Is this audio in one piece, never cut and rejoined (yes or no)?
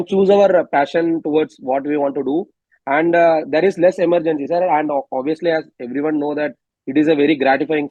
yes